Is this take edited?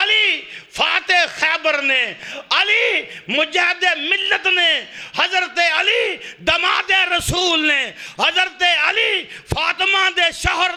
no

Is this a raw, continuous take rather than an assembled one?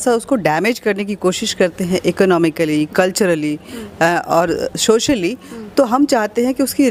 yes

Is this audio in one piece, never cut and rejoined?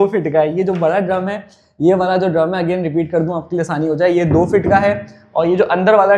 yes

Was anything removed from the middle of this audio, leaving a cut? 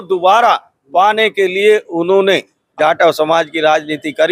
yes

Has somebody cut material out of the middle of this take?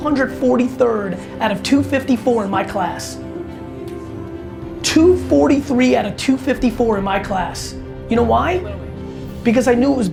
no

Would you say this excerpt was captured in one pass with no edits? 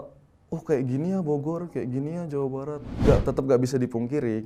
no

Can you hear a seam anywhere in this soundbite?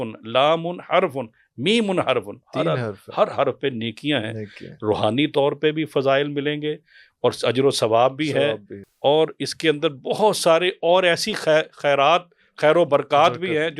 no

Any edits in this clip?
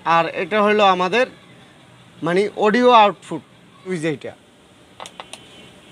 yes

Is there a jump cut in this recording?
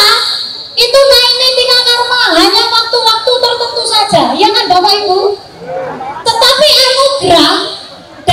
no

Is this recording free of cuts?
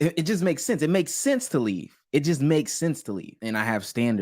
no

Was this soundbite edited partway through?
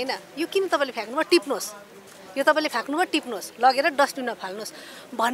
no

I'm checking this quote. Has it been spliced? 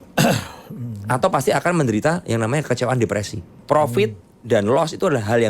yes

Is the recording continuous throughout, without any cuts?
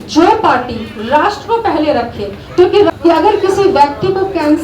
no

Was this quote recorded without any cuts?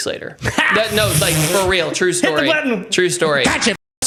yes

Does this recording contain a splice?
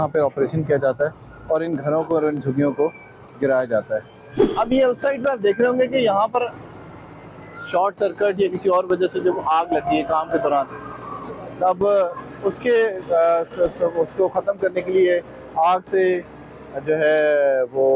no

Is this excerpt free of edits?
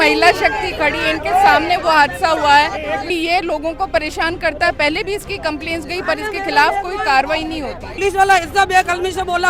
no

